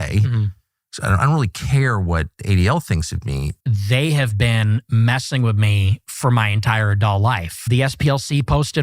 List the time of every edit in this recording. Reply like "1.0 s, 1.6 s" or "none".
3.5 s, 7.6 s

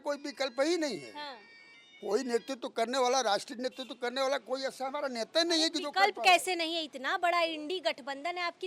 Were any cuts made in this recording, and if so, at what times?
none

